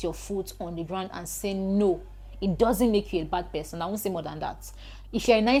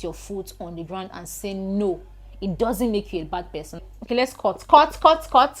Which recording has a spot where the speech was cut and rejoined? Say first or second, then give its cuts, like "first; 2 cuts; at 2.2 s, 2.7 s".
second; 1 cut; at 3.9 s